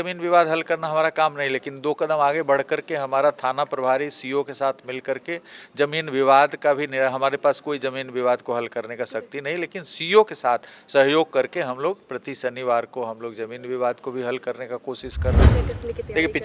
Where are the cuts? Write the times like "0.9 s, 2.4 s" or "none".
15.5 s